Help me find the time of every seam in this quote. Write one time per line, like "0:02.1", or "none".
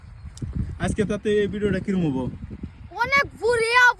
none